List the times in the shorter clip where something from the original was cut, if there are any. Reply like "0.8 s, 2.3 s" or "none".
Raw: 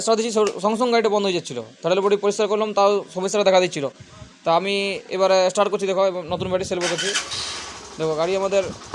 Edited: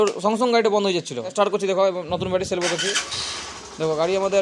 1.3 s